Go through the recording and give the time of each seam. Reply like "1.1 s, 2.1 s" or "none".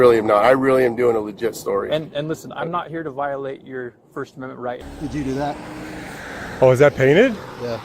4.8 s